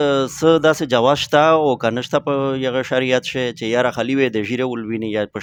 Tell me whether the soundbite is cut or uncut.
uncut